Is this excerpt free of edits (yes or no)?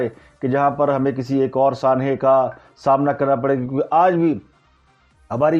yes